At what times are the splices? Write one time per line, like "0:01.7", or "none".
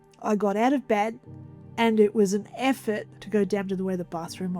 0:03.2